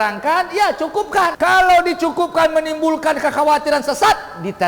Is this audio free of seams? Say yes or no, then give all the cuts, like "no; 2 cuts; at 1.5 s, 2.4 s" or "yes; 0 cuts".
no; 1 cut; at 1.3 s